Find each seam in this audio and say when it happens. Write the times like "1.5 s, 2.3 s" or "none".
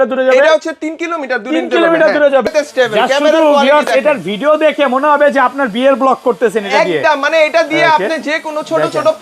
2.5 s